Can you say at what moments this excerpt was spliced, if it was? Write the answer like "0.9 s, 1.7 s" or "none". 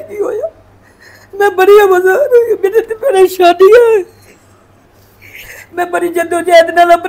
none